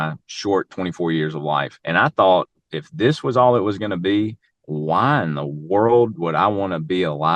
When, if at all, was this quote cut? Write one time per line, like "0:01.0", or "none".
0:01.8